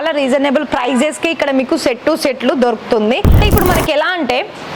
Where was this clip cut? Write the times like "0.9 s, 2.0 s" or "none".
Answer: 3.3 s